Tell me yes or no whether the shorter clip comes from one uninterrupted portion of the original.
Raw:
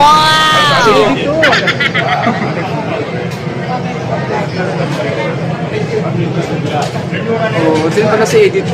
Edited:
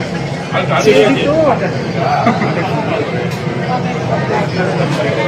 yes